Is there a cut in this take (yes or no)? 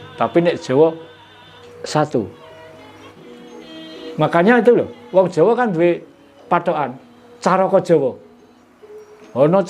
yes